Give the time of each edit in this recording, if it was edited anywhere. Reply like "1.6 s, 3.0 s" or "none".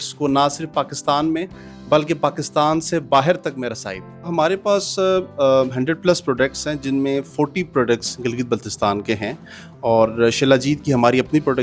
4.3 s